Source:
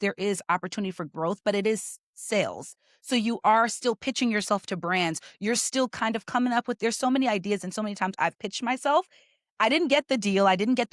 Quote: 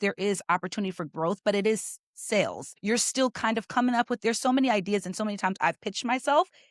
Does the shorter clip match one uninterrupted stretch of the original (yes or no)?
no